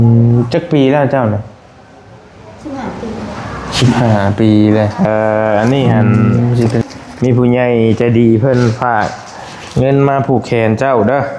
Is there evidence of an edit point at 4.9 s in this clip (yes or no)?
yes